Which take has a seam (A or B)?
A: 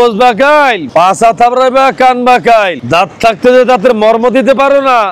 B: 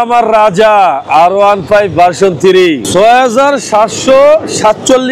B